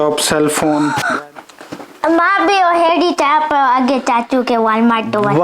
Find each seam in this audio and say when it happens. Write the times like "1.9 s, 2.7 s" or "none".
1.0 s

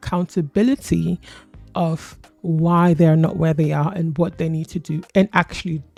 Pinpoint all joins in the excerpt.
none

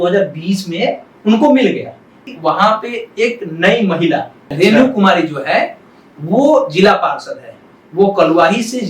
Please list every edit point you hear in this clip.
2.3 s, 4.4 s

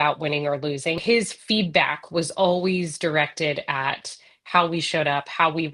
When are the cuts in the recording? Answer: 1.0 s

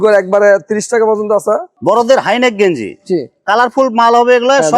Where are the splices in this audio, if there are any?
1.7 s

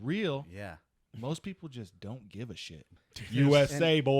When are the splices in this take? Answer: 1.0 s, 3.0 s

